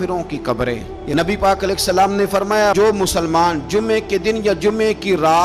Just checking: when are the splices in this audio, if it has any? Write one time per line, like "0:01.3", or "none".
0:00.9